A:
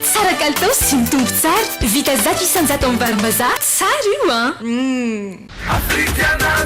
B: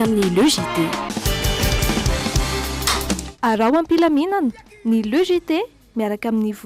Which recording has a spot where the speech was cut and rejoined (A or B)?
A